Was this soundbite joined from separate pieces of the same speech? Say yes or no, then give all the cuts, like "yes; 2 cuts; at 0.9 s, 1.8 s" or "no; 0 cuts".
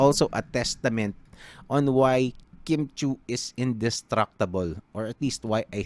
no; 0 cuts